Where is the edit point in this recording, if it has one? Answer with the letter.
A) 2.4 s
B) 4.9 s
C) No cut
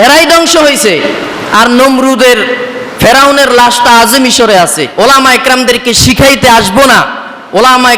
B